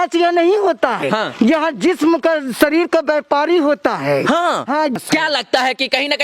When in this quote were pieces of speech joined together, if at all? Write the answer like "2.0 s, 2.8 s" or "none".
1.0 s, 4.9 s